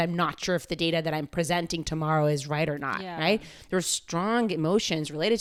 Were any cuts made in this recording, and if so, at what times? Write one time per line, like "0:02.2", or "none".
none